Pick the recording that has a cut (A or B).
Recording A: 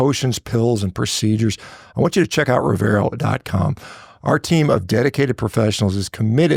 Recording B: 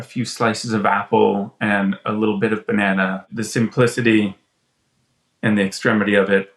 B